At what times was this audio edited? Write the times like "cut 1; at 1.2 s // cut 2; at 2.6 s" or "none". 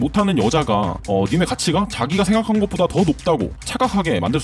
none